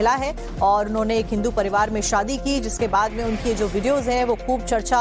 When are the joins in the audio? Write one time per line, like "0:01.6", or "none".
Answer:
none